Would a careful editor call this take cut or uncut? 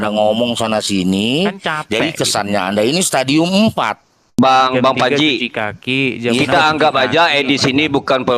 cut